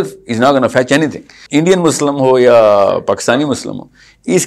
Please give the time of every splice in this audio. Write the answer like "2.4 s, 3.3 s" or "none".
1.4 s